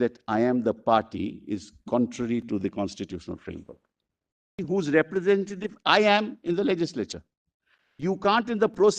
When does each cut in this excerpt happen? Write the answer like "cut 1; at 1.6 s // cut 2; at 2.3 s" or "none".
cut 1; at 4.6 s